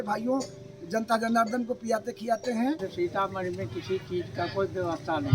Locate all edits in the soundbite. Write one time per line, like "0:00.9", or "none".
0:02.9